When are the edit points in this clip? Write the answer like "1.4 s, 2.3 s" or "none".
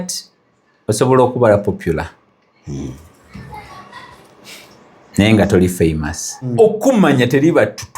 6.5 s